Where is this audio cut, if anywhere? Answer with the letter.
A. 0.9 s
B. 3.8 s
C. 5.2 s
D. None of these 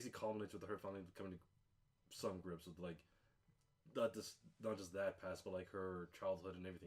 A